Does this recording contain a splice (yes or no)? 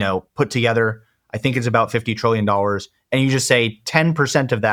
no